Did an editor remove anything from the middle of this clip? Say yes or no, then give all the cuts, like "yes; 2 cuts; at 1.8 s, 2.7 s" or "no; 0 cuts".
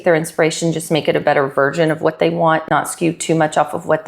yes; 1 cut; at 2.6 s